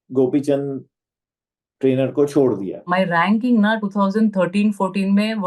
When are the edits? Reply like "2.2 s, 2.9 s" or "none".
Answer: 2.9 s